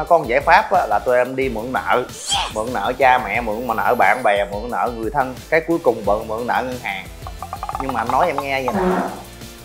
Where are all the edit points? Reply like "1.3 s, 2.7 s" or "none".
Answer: 2.5 s

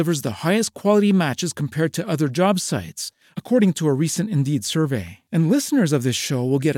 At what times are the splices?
none

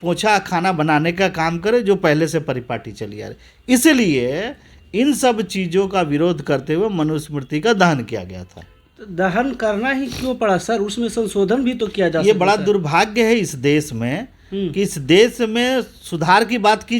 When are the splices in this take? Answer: none

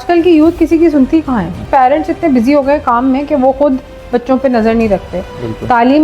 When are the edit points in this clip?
1.7 s

